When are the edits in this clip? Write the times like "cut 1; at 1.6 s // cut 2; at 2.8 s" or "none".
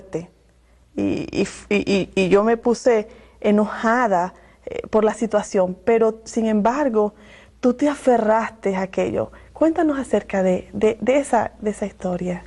cut 1; at 3.2 s

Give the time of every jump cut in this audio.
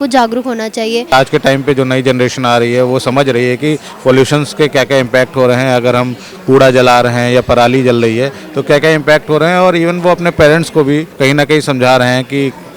cut 1; at 1.1 s // cut 2; at 11.1 s

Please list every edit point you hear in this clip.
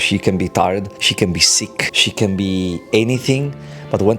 cut 1; at 1.0 s // cut 2; at 1.9 s

